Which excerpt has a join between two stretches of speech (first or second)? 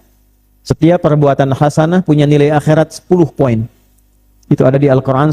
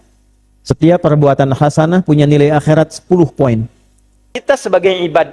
second